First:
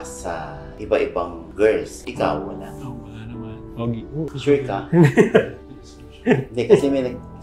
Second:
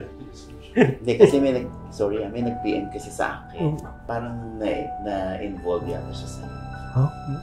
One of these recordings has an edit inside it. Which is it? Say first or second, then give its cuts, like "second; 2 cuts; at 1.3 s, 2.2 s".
first; 2 cuts; at 2.0 s, 4.2 s